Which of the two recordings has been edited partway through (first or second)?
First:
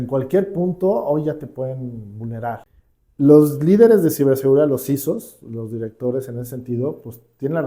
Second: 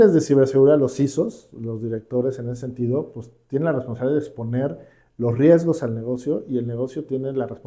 first